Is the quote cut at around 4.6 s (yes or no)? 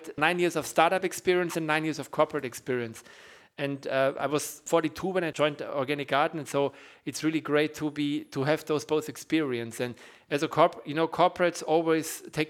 yes